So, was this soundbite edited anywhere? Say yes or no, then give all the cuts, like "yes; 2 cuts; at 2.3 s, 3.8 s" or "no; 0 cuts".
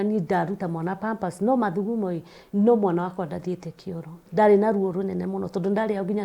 yes; 1 cut; at 4.2 s